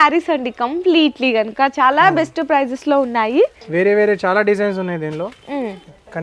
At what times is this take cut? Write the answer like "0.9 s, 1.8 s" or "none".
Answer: 3.6 s